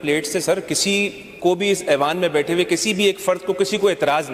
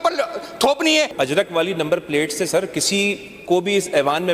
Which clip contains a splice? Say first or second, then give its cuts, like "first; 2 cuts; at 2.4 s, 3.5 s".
second; 1 cut; at 1.2 s